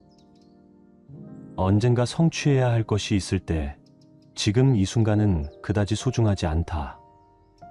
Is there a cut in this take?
no; 0 cuts

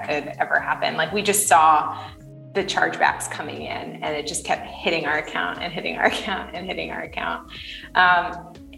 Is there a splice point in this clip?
no; 0 cuts

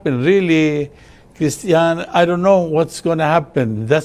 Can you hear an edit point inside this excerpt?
no; 0 cuts

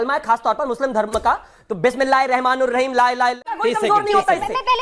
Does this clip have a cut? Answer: yes; 1 cut; at 3.5 s

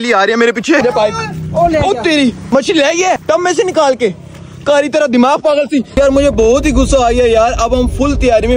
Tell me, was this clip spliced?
yes; 4 cuts; at 0.8 s, 2.4 s, 3.2 s, 6.0 s

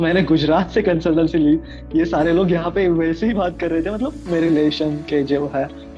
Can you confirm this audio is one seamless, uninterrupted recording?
yes; 0 cuts

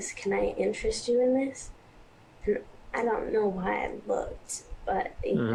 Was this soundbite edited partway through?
no; 0 cuts

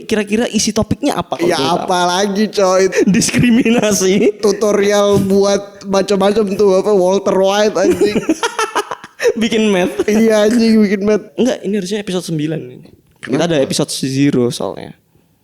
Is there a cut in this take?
yes; 2 cuts; at 2.9 s, 11.3 s

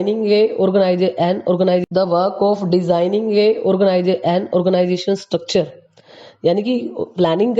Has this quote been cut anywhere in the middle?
yes; 2 cuts; at 1.8 s, 4.9 s

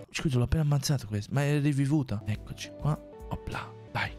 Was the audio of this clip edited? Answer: yes; 1 cut; at 2.2 s

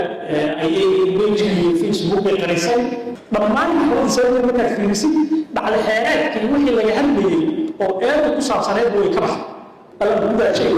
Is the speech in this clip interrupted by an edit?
yes; 1 cut; at 9.8 s

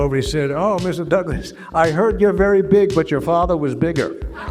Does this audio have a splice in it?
no; 0 cuts

